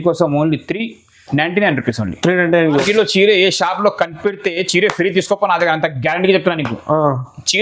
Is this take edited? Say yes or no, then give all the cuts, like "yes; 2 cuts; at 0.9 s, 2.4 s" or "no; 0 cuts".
yes; 1 cut; at 2.8 s